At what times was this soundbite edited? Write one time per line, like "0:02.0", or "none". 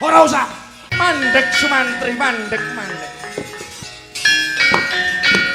0:00.9
0:03.8